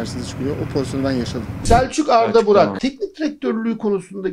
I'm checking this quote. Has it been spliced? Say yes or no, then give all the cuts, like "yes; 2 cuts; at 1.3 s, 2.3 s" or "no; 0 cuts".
yes; 2 cuts; at 1.6 s, 2.8 s